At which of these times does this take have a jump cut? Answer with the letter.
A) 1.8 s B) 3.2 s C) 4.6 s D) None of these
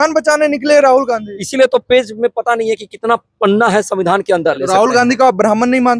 C